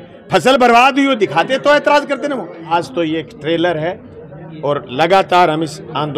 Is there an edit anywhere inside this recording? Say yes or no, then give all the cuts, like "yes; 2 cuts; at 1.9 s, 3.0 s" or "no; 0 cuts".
yes; 1 cut; at 2.7 s